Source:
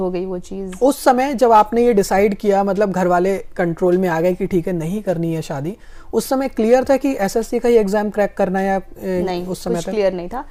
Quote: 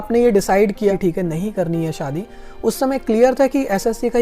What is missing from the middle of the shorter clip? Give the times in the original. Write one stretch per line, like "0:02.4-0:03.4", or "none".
0:02.5-0:04.4